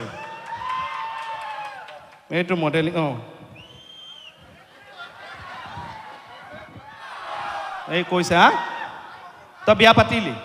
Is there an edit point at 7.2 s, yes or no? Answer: yes